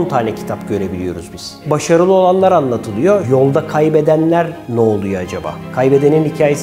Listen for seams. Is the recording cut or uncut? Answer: cut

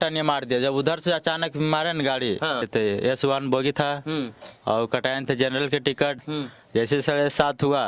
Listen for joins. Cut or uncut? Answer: cut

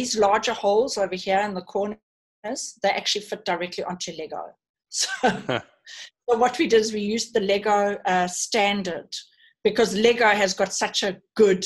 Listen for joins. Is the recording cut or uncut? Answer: uncut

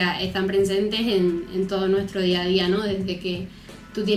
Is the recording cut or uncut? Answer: uncut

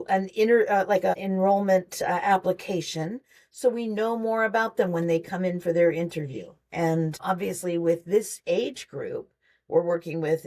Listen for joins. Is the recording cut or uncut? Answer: cut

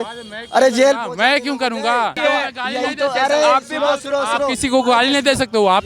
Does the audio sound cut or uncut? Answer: cut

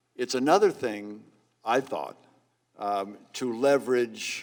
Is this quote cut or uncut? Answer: uncut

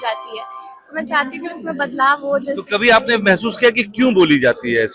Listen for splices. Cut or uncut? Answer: uncut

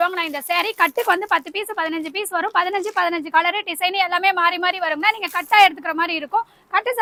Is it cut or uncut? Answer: uncut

